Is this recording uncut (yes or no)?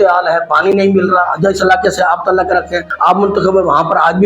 no